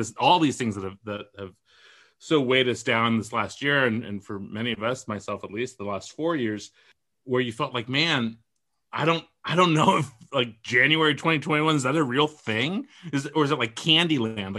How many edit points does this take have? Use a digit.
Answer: 1